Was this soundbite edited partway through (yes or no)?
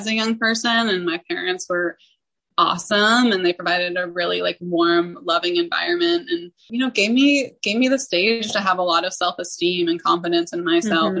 yes